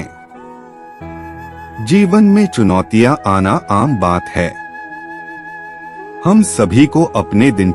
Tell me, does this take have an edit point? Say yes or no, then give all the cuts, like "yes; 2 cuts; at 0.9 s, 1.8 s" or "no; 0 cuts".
no; 0 cuts